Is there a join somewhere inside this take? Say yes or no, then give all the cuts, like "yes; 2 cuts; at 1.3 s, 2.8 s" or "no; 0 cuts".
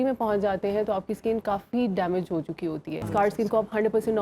yes; 1 cut; at 3.0 s